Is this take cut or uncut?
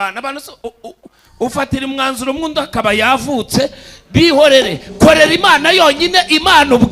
uncut